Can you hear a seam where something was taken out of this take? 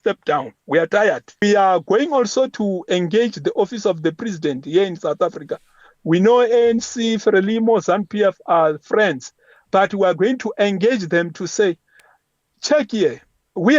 yes; 1 cut; at 1.4 s

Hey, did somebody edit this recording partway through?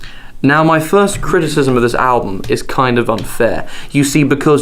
yes; 1 cut; at 1.5 s

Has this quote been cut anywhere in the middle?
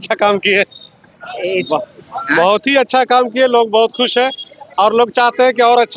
no; 0 cuts

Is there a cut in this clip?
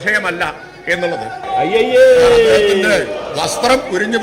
yes; 1 cut; at 1.4 s

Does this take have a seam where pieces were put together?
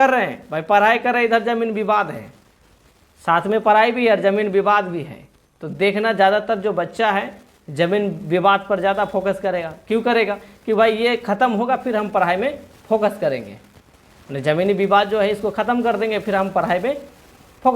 no; 0 cuts

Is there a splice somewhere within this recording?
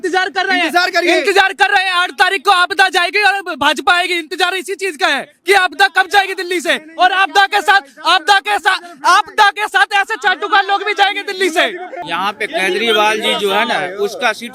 yes; 1 cut; at 11.9 s

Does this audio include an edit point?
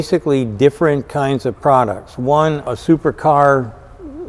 yes; 1 cut; at 2.7 s

